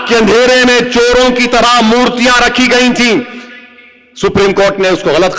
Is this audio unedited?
yes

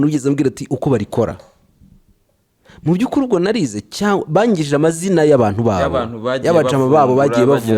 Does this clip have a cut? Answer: no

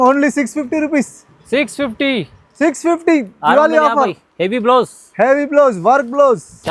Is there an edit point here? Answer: no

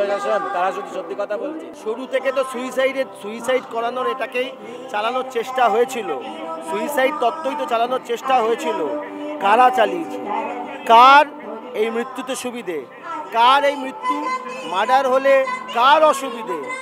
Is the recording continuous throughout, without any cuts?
no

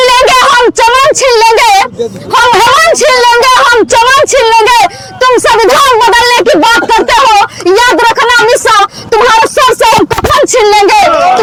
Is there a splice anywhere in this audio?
no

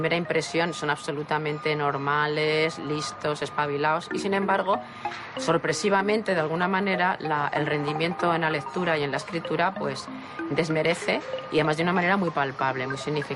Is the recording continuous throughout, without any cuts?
yes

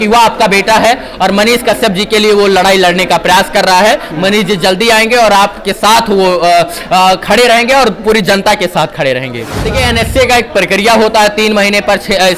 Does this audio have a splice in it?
yes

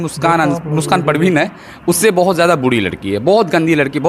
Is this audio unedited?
yes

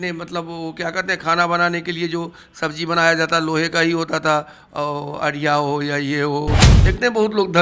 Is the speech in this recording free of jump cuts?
no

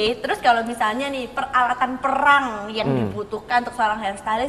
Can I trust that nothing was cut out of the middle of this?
yes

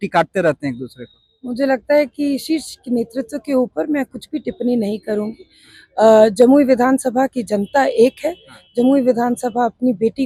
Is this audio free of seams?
yes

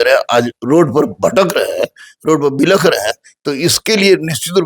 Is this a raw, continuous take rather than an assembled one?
yes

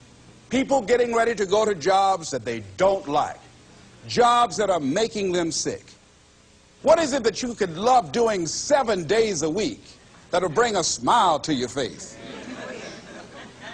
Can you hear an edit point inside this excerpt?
yes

